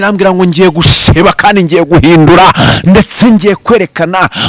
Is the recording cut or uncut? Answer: uncut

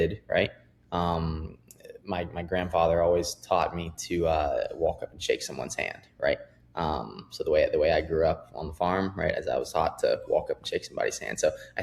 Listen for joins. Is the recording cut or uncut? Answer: uncut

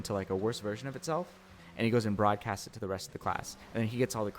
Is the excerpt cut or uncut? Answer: cut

